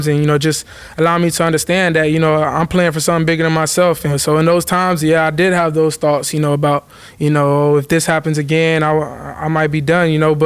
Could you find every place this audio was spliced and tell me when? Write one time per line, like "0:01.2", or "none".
0:04.2